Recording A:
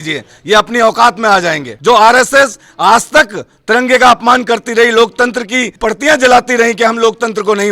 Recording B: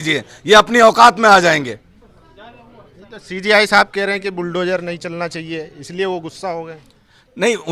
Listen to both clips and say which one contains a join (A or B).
A